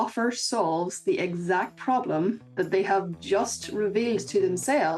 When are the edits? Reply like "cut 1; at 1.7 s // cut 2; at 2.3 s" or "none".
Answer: none

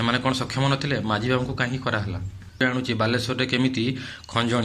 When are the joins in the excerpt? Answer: cut 1; at 2.6 s

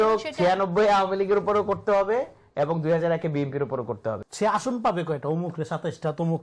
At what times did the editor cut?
cut 1; at 4.2 s

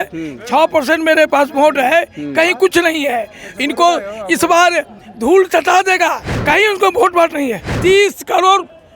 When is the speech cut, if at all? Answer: cut 1; at 6.3 s // cut 2; at 7.7 s

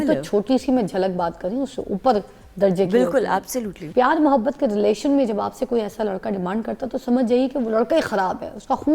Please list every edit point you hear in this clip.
cut 1; at 3.7 s

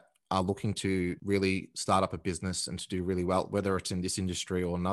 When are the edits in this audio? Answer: cut 1; at 1.2 s

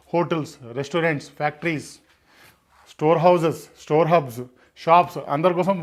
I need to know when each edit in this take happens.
none

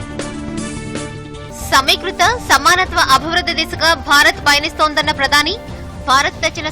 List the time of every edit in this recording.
cut 1; at 1.1 s

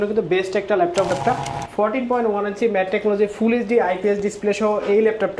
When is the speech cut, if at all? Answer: cut 1; at 1.1 s

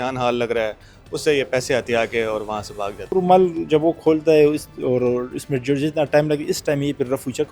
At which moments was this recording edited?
cut 1; at 3.1 s

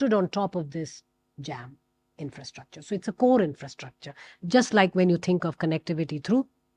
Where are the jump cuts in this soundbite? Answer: none

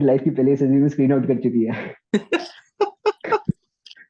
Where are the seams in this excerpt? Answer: none

